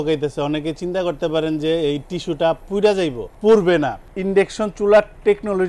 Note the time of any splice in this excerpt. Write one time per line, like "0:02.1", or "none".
none